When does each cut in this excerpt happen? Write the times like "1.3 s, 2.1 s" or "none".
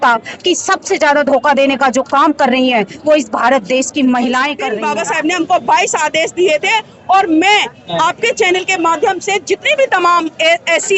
4.7 s